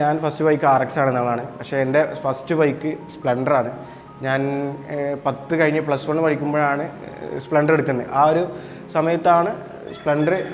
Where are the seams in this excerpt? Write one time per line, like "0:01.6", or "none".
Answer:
none